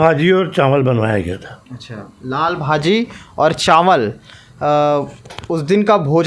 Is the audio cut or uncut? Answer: uncut